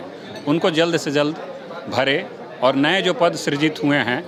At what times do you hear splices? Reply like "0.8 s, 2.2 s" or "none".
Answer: none